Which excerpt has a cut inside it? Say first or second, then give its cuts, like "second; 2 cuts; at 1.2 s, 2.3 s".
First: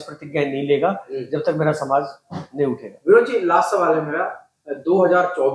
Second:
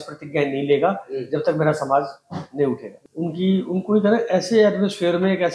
second; 1 cut; at 2.9 s